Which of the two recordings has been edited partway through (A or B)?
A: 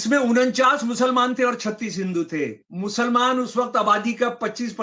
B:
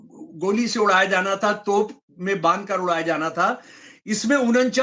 A